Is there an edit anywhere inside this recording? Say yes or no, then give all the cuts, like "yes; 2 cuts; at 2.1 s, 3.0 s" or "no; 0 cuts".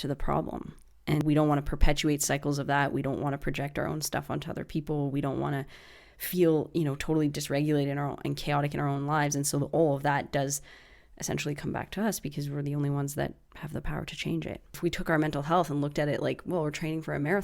yes; 2 cuts; at 1.2 s, 14.6 s